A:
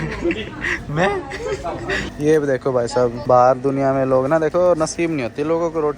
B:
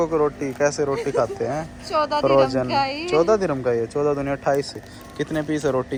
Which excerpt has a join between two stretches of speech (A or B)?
A